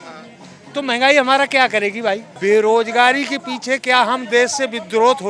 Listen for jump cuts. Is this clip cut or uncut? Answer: cut